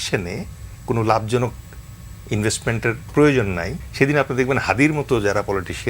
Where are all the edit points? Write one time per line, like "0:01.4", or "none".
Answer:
0:03.8

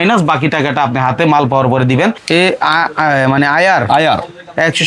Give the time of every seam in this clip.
0:02.2

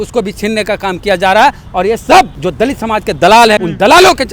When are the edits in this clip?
0:02.4
0:03.6

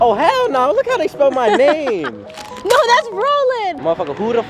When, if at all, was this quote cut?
none

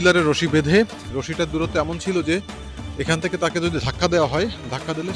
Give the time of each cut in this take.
0:01.0

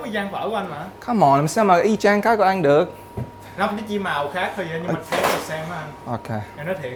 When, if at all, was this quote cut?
none

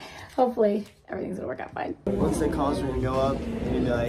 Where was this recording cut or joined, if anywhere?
0:02.1

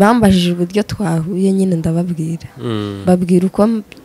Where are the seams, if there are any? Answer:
none

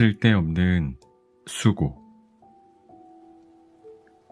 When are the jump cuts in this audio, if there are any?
none

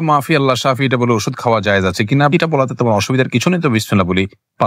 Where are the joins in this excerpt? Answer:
none

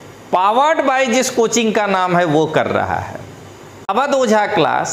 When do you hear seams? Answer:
0:03.9

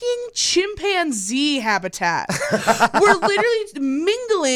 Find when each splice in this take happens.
none

